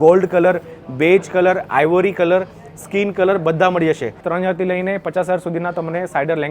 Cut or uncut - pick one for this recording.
cut